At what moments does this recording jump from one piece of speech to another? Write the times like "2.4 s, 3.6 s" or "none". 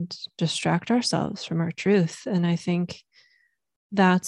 none